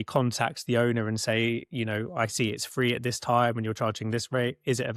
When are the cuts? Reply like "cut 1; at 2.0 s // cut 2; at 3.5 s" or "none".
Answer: none